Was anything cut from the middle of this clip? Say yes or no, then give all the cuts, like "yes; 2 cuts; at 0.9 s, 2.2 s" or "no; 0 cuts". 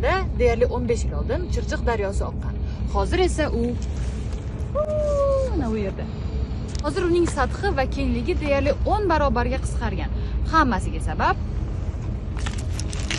no; 0 cuts